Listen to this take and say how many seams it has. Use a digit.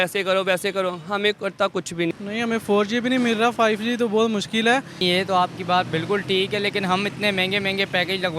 2